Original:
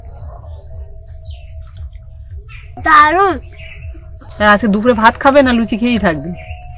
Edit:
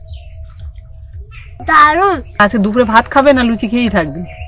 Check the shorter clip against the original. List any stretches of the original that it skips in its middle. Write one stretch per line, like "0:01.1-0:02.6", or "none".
0:03.6-0:04.5